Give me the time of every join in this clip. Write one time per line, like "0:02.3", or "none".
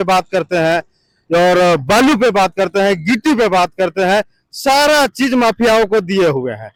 none